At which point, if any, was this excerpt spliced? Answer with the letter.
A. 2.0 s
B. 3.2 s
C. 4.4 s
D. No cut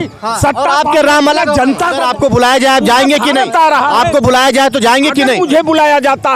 A